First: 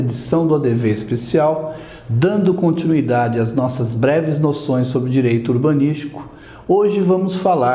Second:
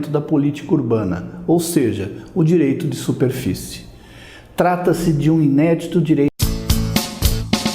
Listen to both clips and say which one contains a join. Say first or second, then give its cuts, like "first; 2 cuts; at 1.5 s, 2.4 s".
second; 1 cut; at 6.3 s